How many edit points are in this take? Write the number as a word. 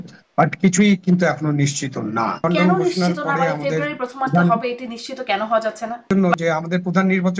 two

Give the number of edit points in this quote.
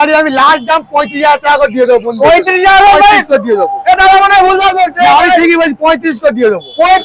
zero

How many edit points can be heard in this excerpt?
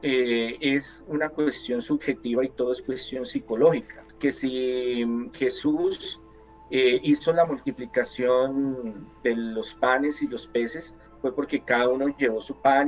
one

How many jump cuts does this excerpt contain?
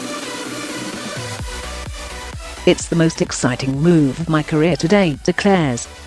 one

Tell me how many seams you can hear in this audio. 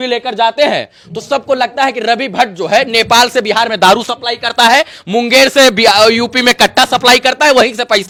zero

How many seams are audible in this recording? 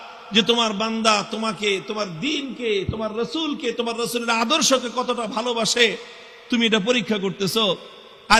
zero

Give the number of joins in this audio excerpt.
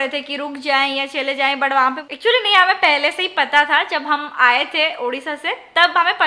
one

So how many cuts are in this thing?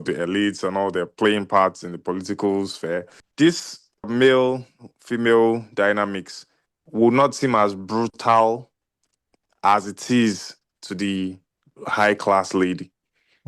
two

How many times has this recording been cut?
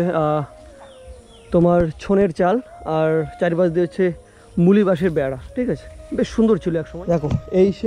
one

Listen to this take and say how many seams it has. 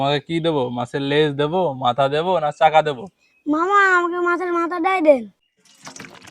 one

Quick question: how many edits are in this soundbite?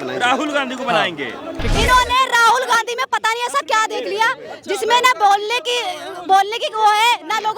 one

